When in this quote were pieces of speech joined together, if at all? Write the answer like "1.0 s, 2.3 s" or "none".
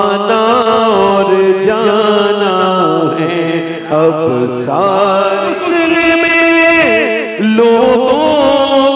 5.6 s